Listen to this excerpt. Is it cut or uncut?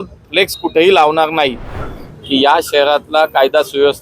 cut